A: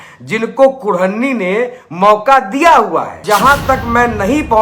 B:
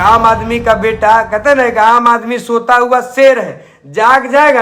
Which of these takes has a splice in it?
A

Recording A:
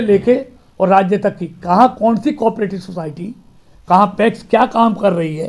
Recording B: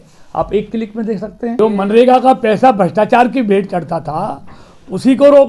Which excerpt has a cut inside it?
B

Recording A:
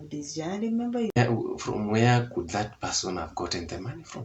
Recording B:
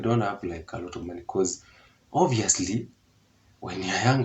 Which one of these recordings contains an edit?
A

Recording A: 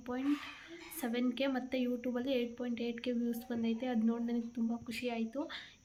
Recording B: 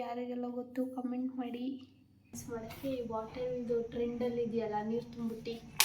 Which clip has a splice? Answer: B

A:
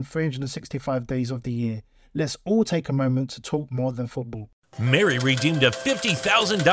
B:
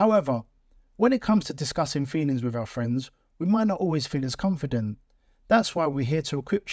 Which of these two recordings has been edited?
A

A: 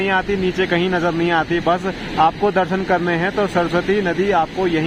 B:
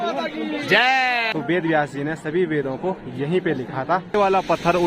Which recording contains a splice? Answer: B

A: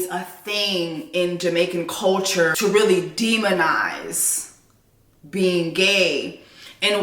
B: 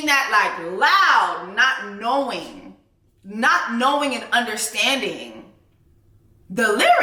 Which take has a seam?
A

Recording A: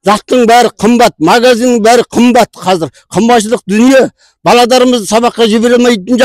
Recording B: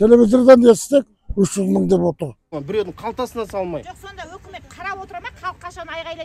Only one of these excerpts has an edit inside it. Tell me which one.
B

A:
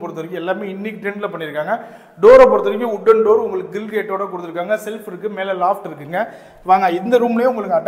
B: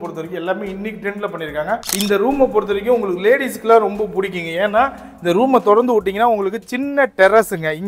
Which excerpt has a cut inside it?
B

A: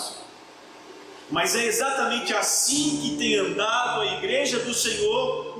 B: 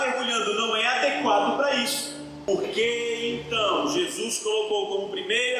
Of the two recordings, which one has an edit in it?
B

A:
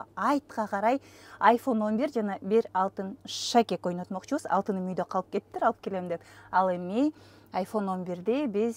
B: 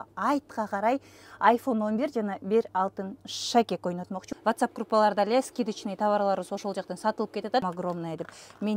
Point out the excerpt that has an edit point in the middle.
B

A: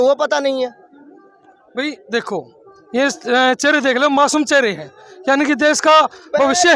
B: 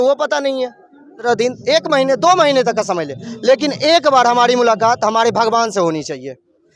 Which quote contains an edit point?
B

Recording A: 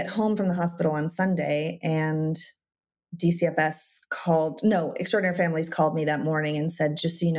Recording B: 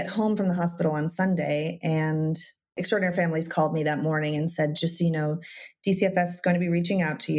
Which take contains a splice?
B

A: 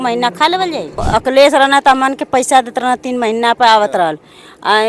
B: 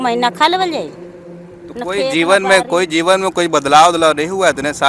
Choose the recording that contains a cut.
A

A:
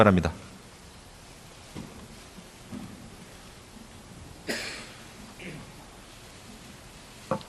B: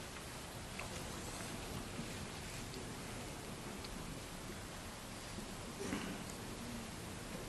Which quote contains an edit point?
B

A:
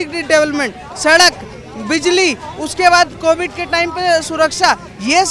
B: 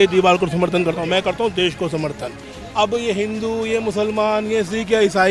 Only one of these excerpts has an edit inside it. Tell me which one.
B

